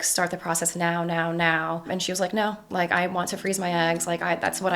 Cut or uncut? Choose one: cut